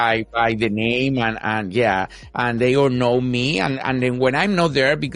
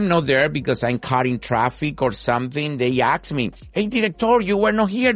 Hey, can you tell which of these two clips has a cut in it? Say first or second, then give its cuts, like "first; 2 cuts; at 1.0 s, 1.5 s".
second; 1 cut; at 3.6 s